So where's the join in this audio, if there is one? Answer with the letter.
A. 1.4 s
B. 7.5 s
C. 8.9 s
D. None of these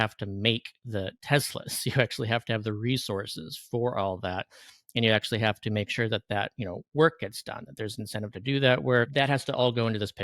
C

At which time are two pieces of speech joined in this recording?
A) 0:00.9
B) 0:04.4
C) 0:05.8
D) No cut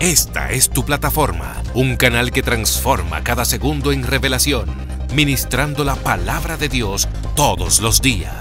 D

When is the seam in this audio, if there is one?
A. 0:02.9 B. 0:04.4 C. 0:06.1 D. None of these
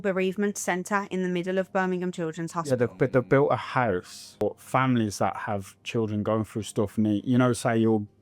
B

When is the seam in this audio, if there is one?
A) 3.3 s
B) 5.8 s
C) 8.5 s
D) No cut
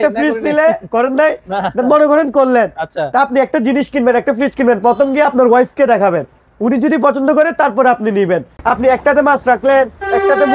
C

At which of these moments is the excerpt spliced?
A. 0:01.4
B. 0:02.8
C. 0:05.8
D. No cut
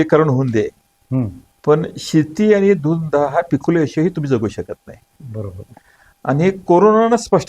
A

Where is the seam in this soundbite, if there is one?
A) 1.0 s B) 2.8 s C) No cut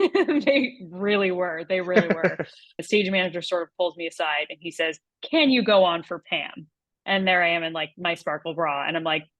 B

